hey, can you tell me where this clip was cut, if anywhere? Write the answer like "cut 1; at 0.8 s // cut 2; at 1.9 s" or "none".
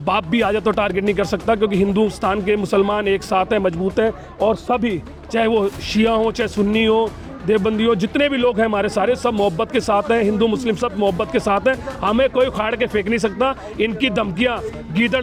none